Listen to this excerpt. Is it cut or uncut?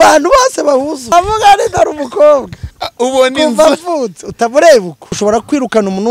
cut